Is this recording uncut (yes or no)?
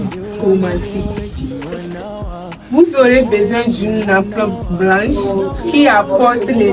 yes